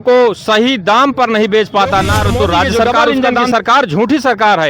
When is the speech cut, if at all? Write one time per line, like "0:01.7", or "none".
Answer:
0:03.3